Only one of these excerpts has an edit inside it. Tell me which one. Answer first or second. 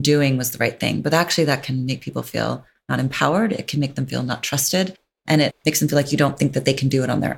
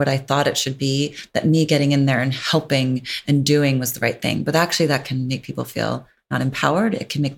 first